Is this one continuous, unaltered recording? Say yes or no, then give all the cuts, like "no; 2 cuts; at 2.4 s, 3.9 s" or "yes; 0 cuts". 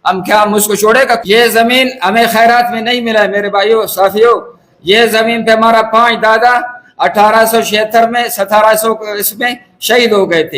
no; 1 cut; at 1.2 s